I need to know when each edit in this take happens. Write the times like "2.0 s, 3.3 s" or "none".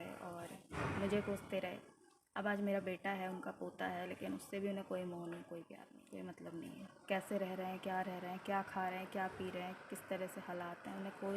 5.9 s